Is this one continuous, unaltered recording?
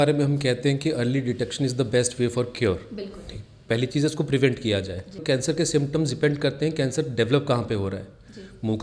no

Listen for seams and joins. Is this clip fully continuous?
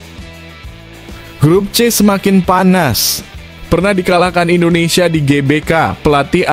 no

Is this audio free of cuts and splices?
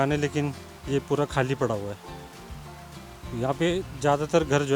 yes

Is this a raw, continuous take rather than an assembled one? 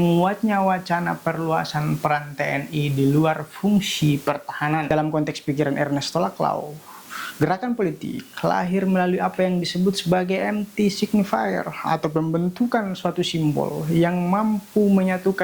no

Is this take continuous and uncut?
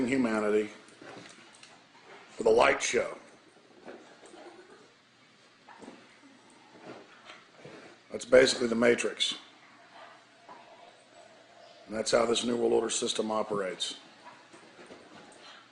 no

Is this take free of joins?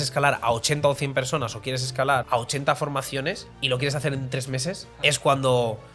no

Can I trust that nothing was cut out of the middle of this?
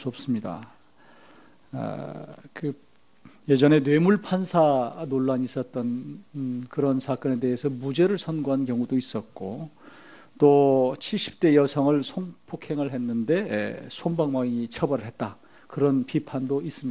no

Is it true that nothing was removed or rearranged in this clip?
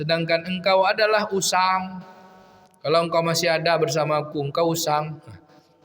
yes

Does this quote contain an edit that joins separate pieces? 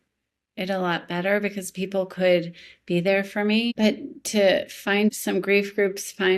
yes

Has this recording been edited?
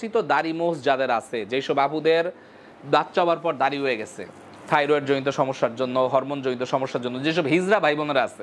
no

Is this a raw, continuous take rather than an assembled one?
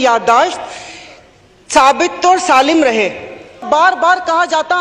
no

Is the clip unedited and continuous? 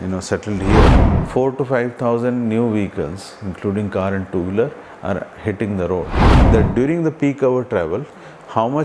no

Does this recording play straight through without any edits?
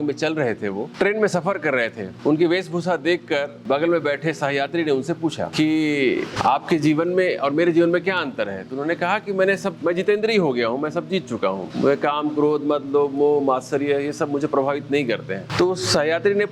no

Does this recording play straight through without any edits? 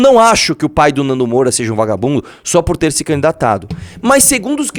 yes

